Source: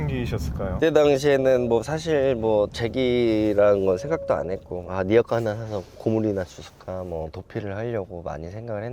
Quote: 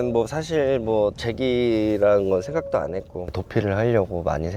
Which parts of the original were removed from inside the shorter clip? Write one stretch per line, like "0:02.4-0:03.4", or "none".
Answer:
0:04.9-0:07.3